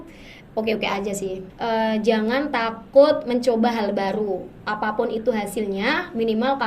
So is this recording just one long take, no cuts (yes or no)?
no